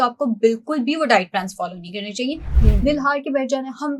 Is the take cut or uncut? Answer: cut